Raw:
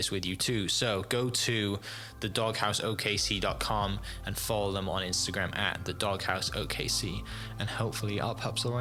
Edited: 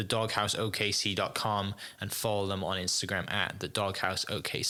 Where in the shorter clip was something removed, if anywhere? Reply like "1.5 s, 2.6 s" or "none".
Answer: none

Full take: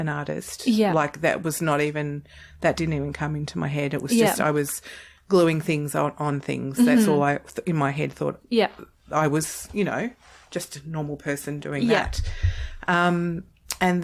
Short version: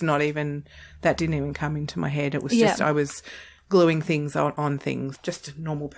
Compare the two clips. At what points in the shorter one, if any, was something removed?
4.7 s

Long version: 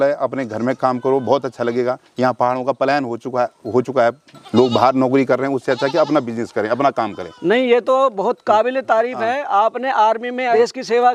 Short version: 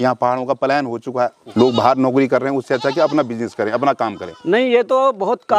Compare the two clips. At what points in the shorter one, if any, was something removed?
1.4 s

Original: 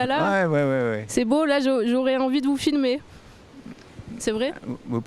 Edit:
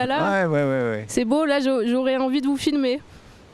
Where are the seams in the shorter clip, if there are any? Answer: none

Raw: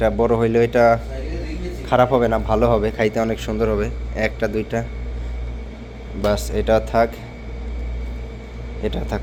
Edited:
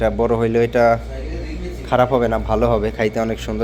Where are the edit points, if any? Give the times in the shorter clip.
none

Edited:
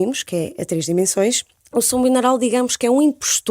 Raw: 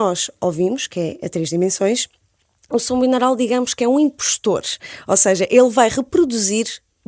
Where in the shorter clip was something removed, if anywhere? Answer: 1.5 s

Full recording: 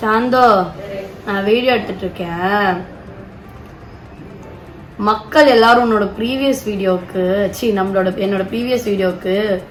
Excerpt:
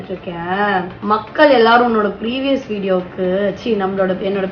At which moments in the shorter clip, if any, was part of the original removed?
0.9 s

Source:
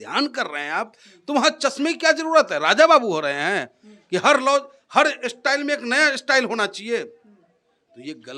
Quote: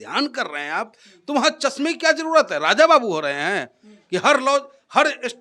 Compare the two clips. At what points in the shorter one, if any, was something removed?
none

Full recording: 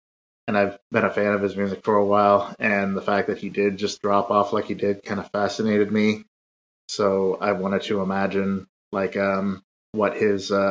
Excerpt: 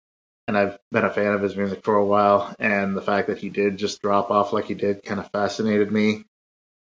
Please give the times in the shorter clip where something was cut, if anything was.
none

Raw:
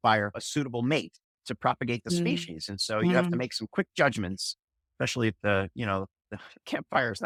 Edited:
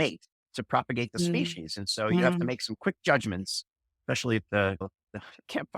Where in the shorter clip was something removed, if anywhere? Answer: 4.8 s

